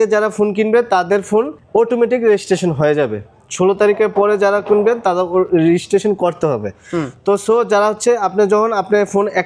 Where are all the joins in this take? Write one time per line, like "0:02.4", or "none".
none